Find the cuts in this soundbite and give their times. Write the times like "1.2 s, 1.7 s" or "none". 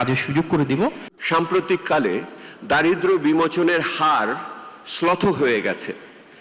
1.1 s